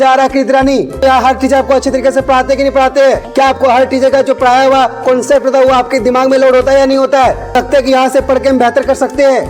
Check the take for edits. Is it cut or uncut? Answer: cut